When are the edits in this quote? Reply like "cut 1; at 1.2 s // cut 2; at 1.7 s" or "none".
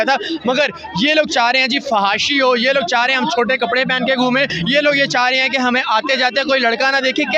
none